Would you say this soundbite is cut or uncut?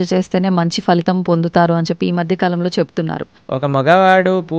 cut